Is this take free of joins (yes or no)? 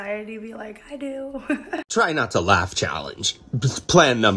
no